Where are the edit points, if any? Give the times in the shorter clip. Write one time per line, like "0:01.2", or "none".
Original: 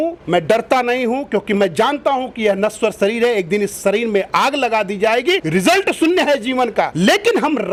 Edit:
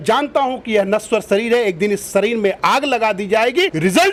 none